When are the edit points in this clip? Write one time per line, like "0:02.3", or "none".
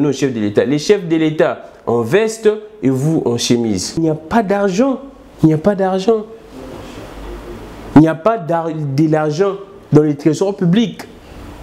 0:03.9